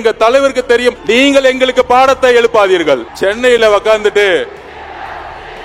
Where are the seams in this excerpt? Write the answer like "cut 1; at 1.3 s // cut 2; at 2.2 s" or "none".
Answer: cut 1; at 1.0 s // cut 2; at 3.1 s // cut 3; at 4.7 s